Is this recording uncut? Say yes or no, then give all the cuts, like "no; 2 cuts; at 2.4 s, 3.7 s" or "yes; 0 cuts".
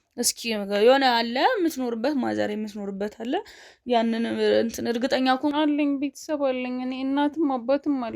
no; 1 cut; at 5.5 s